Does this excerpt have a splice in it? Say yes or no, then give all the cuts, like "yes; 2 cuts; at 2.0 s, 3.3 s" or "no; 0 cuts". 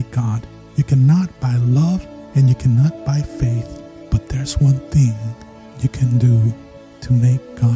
no; 0 cuts